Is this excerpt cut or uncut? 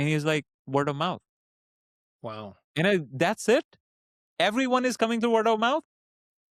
uncut